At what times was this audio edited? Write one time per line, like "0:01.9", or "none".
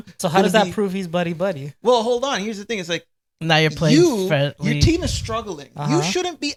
none